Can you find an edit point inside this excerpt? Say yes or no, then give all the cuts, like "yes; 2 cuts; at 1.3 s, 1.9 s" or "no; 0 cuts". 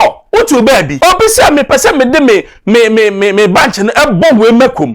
yes; 1 cut; at 0.9 s